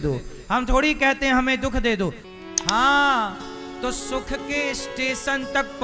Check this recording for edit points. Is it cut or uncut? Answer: cut